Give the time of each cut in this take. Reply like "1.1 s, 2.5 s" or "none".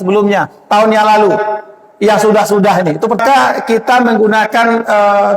3.2 s